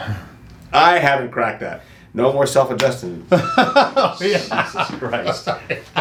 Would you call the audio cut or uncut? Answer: uncut